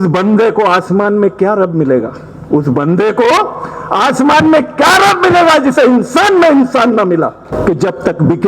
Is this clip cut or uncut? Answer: cut